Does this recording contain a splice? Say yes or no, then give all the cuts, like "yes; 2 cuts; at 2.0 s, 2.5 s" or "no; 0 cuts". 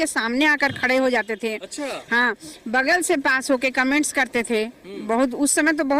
no; 0 cuts